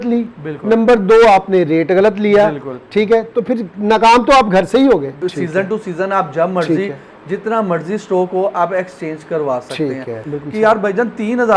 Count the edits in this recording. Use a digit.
2